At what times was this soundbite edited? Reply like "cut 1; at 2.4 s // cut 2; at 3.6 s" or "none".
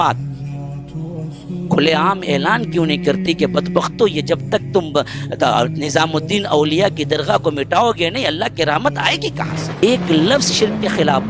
cut 1; at 9.6 s